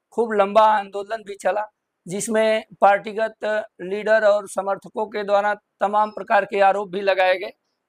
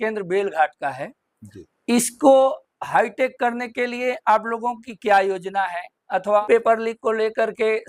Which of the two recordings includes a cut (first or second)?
second